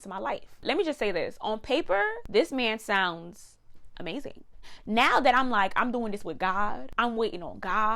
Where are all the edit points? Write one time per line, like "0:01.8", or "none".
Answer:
0:04.7